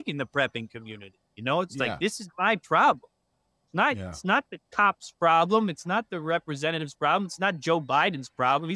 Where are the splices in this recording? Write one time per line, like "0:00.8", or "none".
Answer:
none